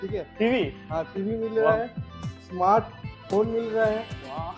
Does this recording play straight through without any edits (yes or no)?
yes